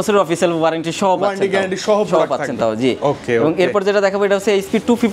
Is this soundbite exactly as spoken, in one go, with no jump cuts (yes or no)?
yes